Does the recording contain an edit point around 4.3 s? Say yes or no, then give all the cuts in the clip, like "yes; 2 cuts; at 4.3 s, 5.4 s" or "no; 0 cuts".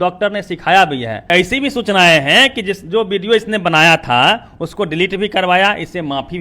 no; 1 cut; at 1.2 s